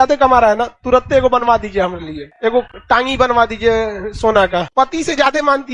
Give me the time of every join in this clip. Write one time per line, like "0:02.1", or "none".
0:04.7